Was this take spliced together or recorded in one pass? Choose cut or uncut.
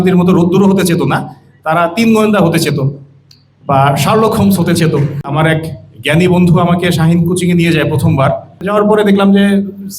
cut